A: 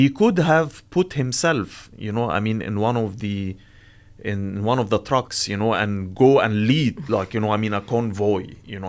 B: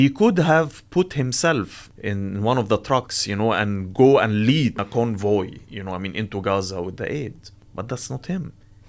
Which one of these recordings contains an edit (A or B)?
B